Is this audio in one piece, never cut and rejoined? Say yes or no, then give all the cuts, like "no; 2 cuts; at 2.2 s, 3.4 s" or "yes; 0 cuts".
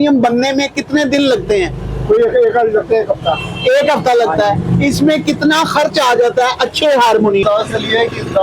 no; 1 cut; at 7.4 s